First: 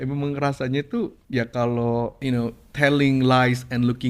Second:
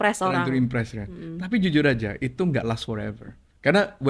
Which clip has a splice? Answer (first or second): first